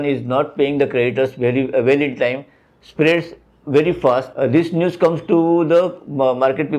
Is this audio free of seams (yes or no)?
yes